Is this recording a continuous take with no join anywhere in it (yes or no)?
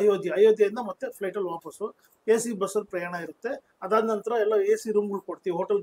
yes